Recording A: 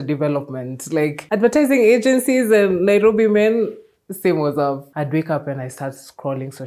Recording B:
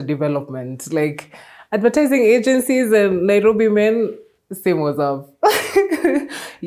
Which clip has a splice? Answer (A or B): A